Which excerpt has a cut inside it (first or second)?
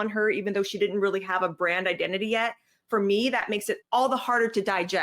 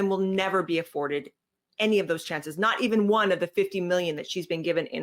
first